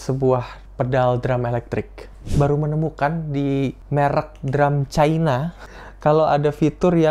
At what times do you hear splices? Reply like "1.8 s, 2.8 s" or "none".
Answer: 2.2 s, 3.8 s, 5.7 s